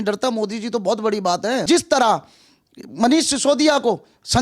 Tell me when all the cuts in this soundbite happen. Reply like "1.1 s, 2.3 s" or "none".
1.6 s

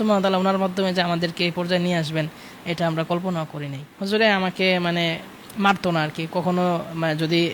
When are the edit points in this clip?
3.9 s

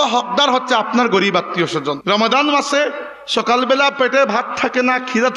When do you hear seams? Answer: 2.0 s

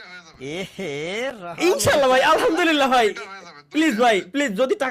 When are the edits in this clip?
none

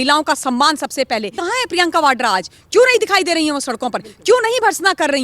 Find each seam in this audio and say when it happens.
1.4 s

